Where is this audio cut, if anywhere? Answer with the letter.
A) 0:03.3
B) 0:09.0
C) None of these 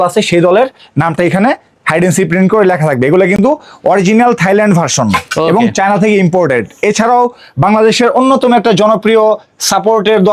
C